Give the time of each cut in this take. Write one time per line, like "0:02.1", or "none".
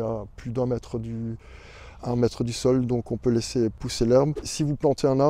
0:03.8
0:04.5